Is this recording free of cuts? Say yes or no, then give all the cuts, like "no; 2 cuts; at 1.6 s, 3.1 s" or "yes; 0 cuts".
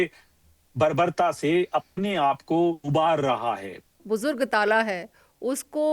no; 1 cut; at 4.0 s